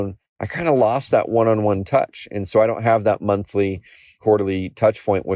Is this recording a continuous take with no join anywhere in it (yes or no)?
no